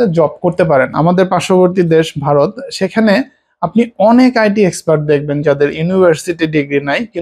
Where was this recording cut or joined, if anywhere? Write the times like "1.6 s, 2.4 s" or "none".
0.9 s